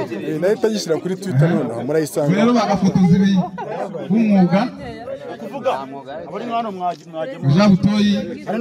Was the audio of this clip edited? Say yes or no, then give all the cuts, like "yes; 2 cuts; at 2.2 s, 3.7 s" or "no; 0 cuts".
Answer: no; 0 cuts